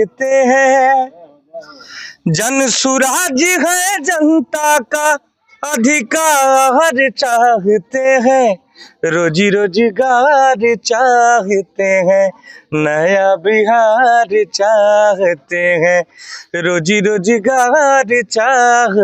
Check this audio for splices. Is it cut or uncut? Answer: uncut